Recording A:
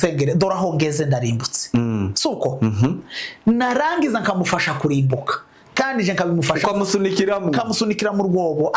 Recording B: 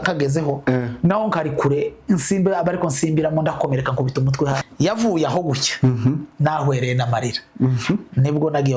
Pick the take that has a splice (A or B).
B